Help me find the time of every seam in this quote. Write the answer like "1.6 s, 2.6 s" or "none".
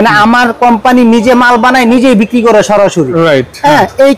none